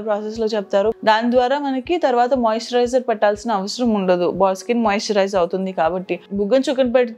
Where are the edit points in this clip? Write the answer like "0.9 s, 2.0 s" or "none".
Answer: 0.9 s, 6.2 s